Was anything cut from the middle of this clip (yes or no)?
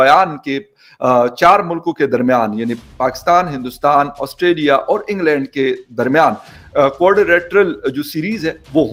no